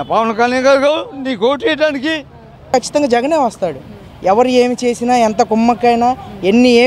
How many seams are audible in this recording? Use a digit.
1